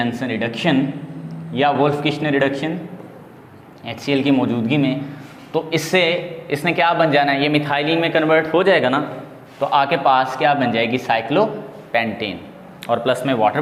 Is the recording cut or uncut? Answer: uncut